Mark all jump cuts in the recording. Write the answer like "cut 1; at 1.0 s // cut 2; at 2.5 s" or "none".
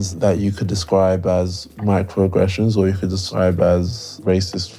cut 1; at 3.2 s